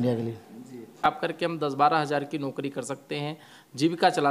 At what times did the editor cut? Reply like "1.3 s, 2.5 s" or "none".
1.0 s

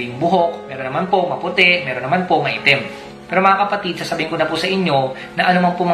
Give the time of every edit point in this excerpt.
3.0 s

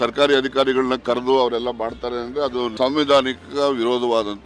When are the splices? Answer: 2.7 s

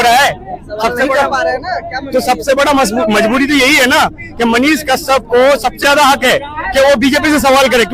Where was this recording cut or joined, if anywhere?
none

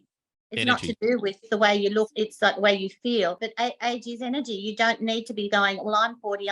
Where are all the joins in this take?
1.4 s, 2.1 s, 3.4 s

